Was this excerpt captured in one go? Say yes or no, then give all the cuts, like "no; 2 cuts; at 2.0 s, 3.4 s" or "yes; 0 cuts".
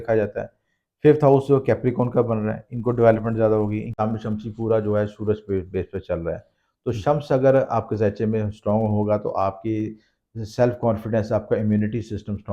no; 1 cut; at 3.9 s